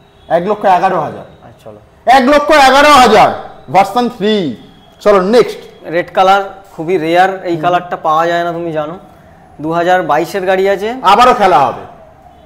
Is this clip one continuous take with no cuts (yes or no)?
yes